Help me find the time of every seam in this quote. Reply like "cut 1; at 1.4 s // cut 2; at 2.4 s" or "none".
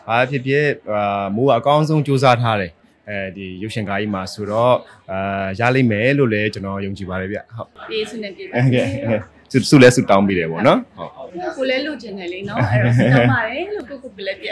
none